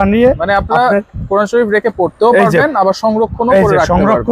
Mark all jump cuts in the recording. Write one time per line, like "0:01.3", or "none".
none